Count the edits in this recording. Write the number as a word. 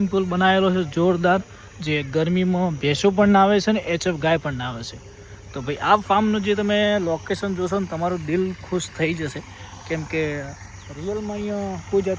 zero